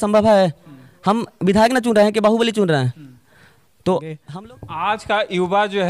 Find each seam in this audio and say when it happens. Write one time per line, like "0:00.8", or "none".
0:04.2